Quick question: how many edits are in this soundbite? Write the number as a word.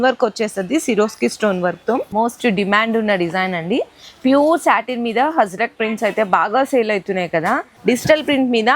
two